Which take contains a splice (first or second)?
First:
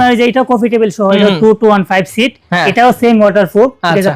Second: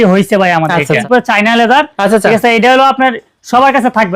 second